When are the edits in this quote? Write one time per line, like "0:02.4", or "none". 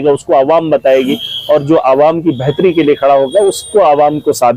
none